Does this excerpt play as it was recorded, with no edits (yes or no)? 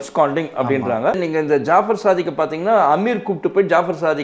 no